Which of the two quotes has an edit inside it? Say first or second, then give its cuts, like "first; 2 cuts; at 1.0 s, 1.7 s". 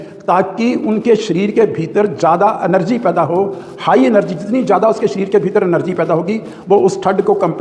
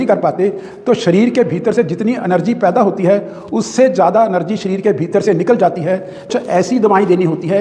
second; 1 cut; at 6.3 s